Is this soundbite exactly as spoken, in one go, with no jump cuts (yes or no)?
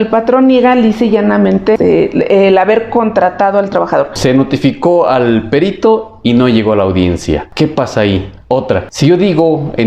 no